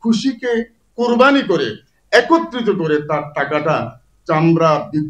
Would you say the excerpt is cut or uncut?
uncut